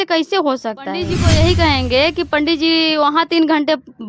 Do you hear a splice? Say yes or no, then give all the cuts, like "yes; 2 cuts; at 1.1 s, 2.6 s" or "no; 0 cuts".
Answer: yes; 1 cut; at 1.1 s